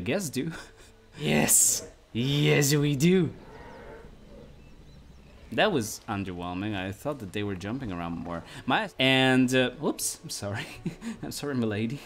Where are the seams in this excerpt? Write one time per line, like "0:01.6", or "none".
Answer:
0:01.2
0:08.9